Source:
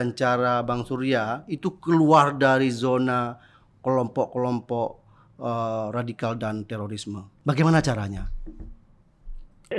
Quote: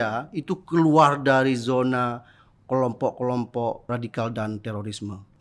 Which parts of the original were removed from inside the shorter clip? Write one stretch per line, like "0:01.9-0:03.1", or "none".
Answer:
0:05.0-0:05.9